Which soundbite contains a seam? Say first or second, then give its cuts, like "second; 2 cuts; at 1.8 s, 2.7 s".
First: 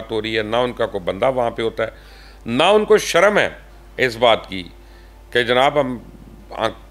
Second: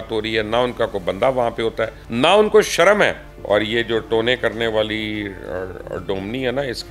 second; 2 cuts; at 2.0 s, 3.3 s